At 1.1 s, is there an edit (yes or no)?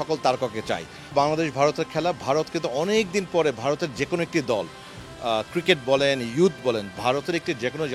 yes